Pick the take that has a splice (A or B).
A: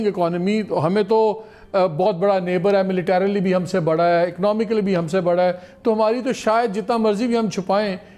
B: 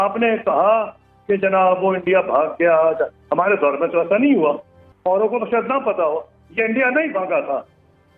B